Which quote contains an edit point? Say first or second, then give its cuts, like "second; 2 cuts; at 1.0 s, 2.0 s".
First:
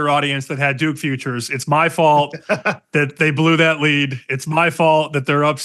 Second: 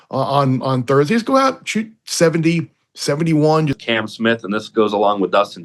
second; 1 cut; at 3.8 s